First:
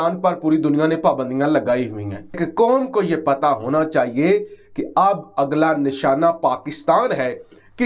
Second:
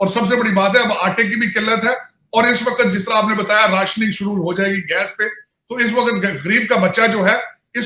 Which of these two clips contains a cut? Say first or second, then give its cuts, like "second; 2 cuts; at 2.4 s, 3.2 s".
first; 1 cut; at 2.3 s